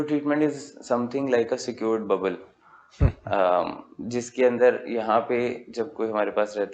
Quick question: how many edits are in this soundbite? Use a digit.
0